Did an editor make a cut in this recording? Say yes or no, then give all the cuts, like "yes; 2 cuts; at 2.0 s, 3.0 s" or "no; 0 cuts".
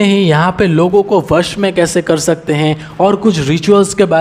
no; 0 cuts